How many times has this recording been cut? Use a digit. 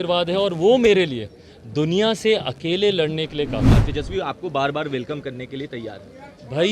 1